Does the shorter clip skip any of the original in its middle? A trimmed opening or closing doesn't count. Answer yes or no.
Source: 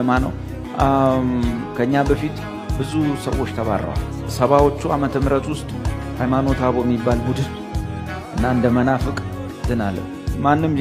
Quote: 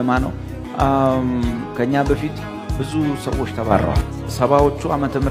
no